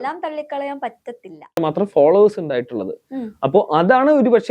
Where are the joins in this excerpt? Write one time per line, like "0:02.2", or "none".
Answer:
0:01.6